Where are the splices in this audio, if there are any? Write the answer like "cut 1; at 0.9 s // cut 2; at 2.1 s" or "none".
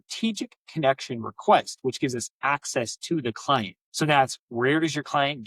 cut 1; at 3.8 s